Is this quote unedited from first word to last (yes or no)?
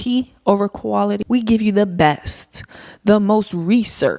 no